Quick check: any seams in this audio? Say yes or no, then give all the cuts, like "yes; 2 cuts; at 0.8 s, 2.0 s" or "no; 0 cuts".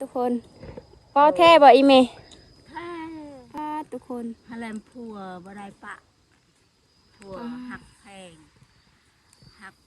yes; 1 cut; at 3.6 s